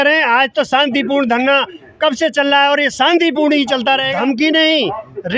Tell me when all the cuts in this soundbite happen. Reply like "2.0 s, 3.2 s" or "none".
4.1 s